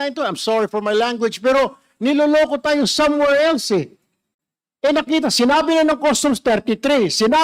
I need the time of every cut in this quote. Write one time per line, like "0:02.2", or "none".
none